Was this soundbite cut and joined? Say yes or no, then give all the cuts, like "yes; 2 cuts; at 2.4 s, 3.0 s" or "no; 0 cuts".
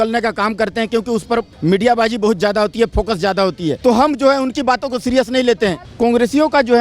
yes; 3 cuts; at 1.5 s, 3.8 s, 5.8 s